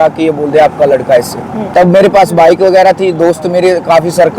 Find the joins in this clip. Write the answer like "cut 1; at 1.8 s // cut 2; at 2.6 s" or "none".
cut 1; at 1.6 s